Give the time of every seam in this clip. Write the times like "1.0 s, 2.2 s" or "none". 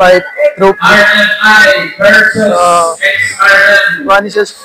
none